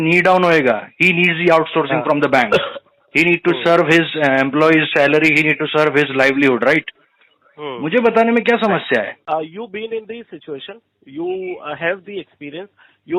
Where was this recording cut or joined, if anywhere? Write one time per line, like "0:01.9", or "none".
0:09.2